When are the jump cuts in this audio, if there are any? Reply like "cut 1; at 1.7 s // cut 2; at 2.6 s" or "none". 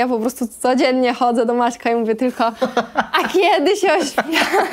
none